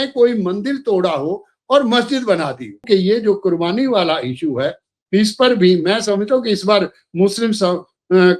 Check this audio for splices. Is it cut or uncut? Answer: cut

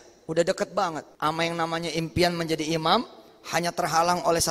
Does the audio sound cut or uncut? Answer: cut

